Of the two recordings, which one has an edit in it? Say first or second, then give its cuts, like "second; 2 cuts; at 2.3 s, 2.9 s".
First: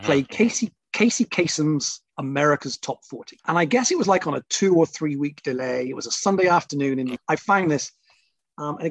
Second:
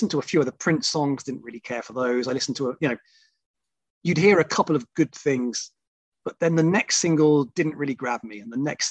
first; 2 cuts; at 3.5 s, 7.2 s